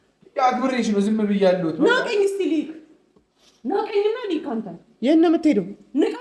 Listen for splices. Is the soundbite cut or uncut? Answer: uncut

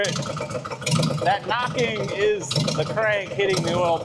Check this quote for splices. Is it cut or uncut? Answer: uncut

